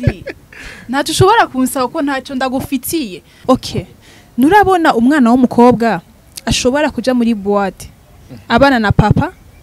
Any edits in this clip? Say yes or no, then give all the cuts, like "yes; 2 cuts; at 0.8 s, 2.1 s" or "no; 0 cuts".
yes; 1 cut; at 3.3 s